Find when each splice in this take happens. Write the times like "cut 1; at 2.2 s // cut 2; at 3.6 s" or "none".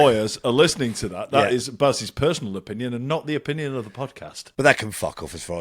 cut 1; at 4.3 s